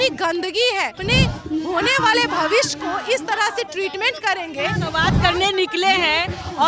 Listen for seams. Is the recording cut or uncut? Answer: cut